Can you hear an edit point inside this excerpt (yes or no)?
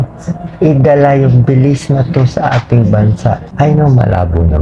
yes